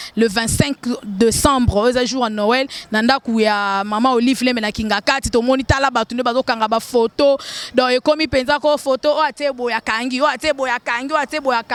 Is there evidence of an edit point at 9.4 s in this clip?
no; 0 cuts

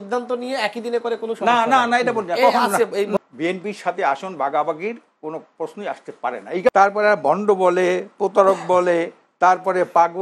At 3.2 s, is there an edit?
yes; 2 cuts; at 3.2 s, 6.7 s

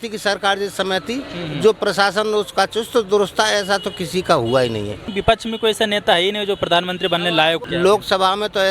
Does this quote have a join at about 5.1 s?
yes; 2 cuts; at 5.1 s, 7.6 s

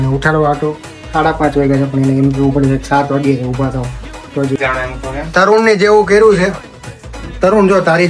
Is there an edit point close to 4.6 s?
yes; 1 cut; at 4.6 s

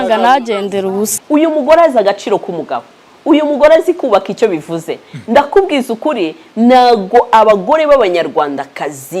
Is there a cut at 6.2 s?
no; 1 cut; at 1.1 s

